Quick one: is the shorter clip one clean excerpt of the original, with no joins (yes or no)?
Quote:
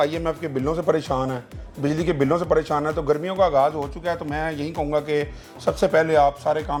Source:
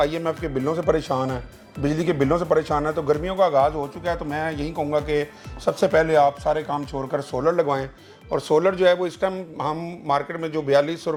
yes